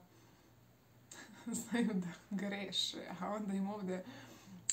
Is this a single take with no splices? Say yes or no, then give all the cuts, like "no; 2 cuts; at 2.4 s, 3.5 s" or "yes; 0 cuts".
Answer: yes; 0 cuts